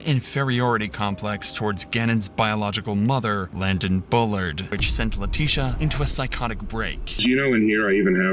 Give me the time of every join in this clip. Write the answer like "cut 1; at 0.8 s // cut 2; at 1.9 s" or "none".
cut 1; at 4.7 s // cut 2; at 7.2 s